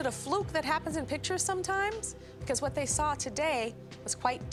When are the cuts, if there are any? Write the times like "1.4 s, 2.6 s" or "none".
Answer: none